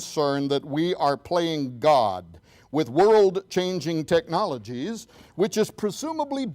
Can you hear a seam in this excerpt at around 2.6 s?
no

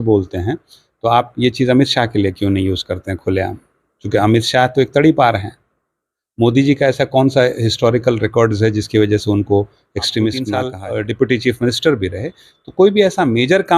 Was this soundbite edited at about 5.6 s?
no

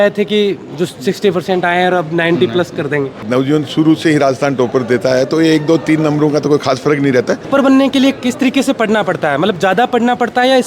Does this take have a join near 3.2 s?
yes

